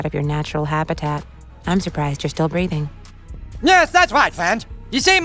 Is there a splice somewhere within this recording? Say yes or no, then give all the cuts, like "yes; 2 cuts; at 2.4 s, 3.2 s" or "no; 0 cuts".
yes; 1 cut; at 3.0 s